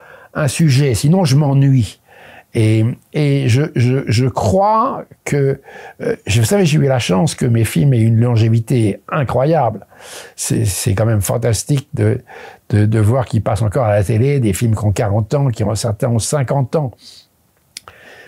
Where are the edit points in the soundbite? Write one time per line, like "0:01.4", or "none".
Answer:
none